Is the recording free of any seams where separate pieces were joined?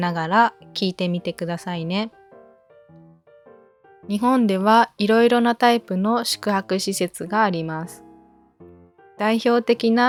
yes; 0 cuts

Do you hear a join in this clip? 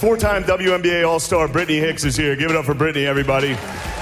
no; 0 cuts

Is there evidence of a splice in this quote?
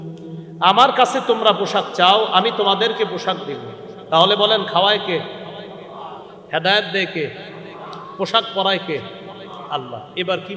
no; 0 cuts

